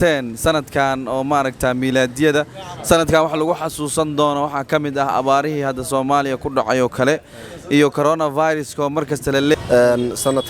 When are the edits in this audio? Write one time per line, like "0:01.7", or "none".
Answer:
0:09.5